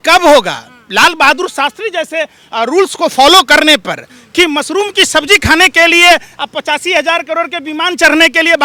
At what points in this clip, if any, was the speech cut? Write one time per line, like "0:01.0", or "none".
none